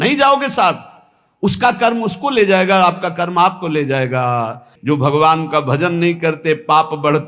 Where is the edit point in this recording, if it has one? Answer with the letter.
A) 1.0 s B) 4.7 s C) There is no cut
B